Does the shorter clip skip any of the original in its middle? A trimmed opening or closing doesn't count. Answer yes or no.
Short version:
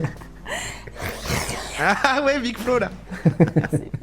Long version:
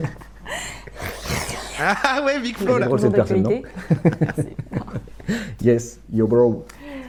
yes